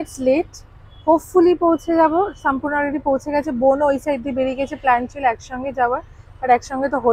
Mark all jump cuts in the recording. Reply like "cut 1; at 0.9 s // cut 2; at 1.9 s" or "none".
none